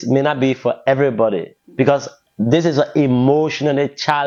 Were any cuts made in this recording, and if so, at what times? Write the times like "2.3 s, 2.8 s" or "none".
none